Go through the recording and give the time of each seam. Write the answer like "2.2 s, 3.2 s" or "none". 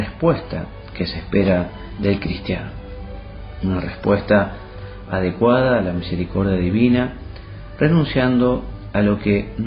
none